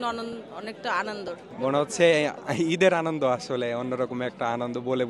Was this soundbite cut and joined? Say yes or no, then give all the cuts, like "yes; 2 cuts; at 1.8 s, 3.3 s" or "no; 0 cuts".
yes; 1 cut; at 1.4 s